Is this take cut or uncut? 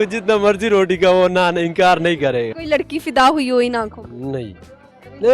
cut